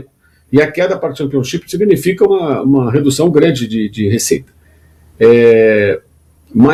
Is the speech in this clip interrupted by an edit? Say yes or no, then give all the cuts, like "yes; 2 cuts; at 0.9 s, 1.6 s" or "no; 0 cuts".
no; 0 cuts